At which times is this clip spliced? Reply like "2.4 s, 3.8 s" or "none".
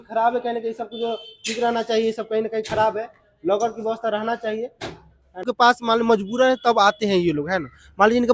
5.4 s